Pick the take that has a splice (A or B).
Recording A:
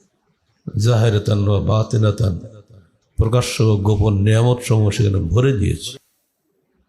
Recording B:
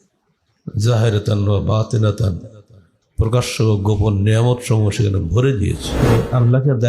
B